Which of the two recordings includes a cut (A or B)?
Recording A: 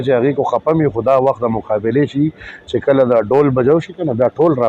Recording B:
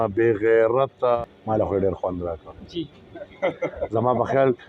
B